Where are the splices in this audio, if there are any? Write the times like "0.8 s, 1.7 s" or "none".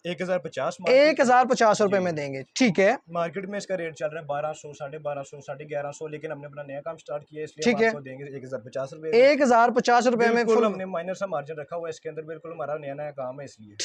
none